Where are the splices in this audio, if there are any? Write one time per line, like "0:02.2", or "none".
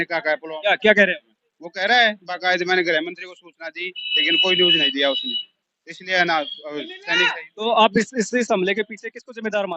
none